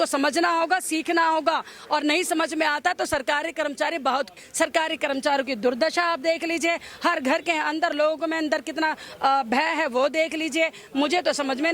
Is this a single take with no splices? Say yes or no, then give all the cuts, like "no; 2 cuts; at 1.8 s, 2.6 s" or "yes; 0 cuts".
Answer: no; 1 cut; at 4.4 s